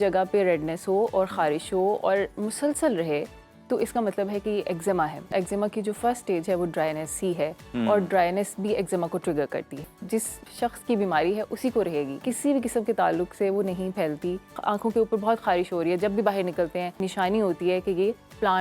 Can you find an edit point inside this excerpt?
yes; 5 cuts; at 5.3 s, 10.3 s, 12.2 s, 14.6 s, 17.0 s

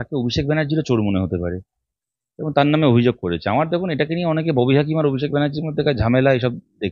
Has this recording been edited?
no; 0 cuts

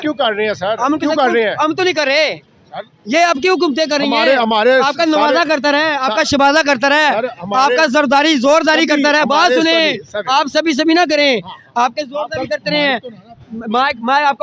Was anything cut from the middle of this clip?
no; 0 cuts

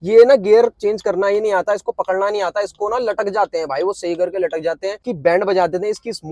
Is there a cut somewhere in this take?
yes; 1 cut; at 5.1 s

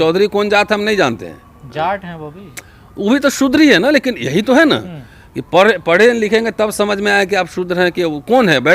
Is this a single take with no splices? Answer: yes; 0 cuts

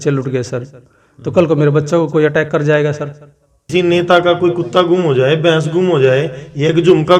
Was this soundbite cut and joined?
yes; 1 cut; at 3.6 s

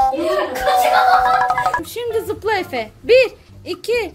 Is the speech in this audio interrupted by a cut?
yes; 1 cut; at 1.9 s

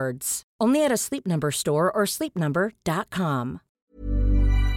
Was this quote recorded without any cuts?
no; 1 cut; at 3.7 s

